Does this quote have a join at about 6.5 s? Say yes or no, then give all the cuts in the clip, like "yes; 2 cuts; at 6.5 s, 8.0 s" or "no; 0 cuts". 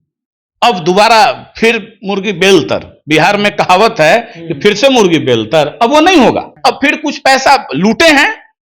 yes; 1 cut; at 6.5 s